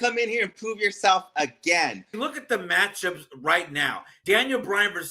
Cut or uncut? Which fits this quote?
cut